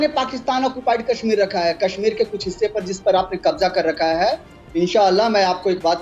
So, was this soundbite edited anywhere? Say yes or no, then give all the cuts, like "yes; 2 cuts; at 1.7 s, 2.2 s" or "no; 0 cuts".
no; 0 cuts